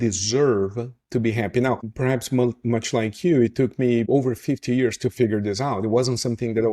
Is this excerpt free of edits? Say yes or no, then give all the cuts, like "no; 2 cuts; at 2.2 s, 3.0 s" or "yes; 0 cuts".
no; 2 cuts; at 1.9 s, 4.1 s